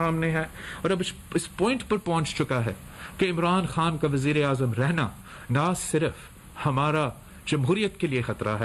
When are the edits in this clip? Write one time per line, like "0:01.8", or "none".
none